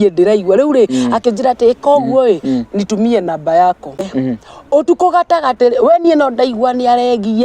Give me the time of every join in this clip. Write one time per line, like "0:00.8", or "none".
0:04.0